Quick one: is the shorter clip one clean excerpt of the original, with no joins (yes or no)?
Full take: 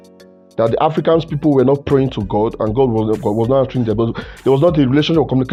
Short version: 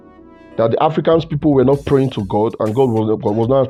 yes